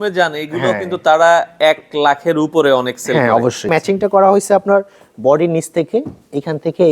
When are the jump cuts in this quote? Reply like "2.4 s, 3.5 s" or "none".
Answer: 3.7 s